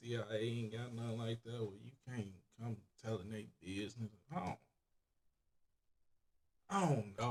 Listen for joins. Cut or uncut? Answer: uncut